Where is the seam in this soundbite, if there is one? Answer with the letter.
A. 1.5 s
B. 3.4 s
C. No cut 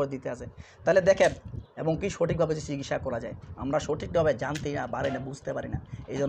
A